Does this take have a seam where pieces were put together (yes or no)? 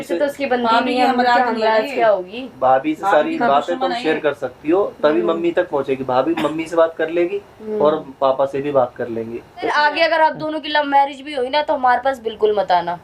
yes